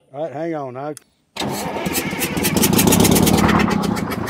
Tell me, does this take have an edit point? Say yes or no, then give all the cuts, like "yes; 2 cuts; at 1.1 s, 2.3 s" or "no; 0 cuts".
yes; 1 cut; at 1.1 s